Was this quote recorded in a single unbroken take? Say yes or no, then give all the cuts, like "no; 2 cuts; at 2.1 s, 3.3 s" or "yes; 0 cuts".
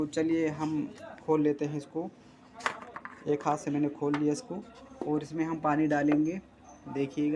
yes; 0 cuts